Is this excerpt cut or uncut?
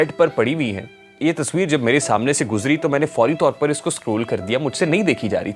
uncut